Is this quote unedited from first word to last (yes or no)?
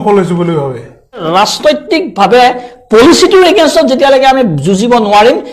no